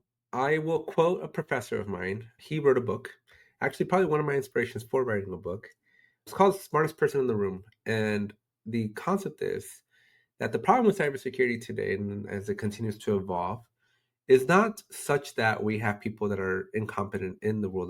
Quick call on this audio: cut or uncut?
cut